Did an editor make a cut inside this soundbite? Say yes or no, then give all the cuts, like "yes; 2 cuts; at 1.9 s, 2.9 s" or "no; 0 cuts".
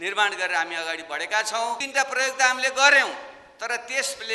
yes; 1 cut; at 1.8 s